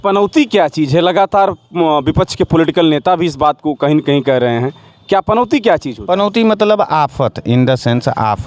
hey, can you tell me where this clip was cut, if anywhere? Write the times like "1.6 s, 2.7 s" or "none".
none